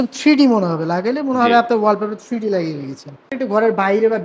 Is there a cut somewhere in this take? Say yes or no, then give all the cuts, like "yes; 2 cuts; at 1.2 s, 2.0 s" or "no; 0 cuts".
yes; 1 cut; at 3.3 s